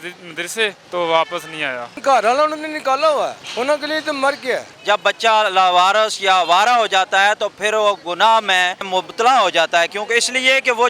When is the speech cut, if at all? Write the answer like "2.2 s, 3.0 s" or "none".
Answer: 0.8 s, 1.9 s, 3.4 s, 4.7 s, 8.8 s